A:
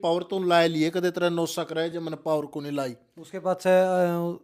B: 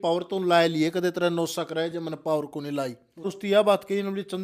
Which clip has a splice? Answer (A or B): B